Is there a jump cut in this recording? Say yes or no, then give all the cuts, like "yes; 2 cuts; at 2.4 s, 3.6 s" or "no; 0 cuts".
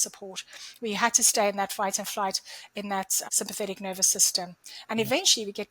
yes; 1 cut; at 3.2 s